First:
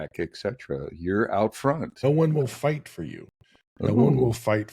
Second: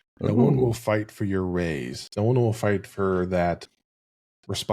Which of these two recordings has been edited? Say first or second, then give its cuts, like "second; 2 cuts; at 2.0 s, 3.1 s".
first; 1 cut; at 2.0 s